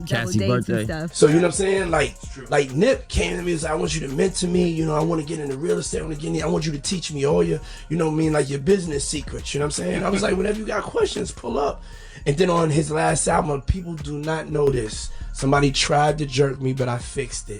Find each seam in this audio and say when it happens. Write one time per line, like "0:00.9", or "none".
0:00.9